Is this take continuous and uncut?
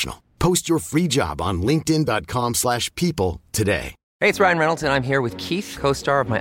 no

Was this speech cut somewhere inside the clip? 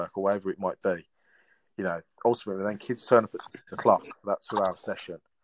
no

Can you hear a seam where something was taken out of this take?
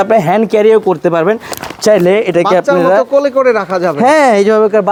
no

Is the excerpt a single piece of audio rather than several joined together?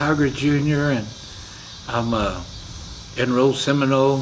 yes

